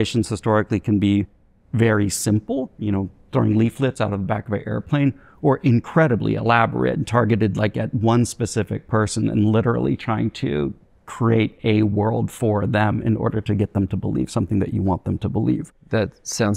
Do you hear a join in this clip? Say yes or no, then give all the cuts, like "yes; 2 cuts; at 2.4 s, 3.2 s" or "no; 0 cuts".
no; 0 cuts